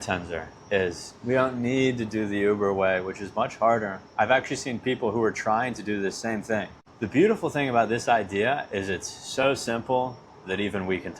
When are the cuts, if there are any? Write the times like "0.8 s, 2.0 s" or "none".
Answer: 6.8 s